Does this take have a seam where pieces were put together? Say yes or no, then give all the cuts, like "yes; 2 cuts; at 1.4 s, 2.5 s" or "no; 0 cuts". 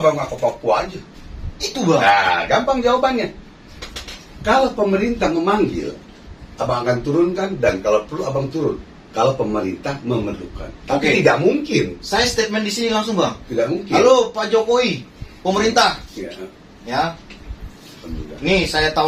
no; 0 cuts